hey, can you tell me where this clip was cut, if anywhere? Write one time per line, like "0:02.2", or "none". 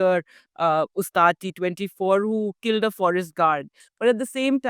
0:03.8